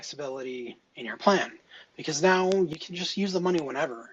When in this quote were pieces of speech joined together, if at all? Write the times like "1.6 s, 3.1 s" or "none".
2.7 s